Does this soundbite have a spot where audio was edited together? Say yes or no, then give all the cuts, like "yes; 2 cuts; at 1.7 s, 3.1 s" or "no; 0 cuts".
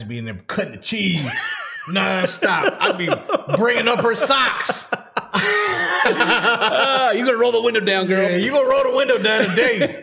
yes; 1 cut; at 5.3 s